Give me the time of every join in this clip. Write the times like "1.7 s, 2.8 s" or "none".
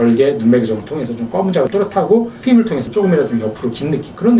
2.3 s